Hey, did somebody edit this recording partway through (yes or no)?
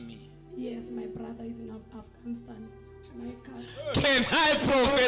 no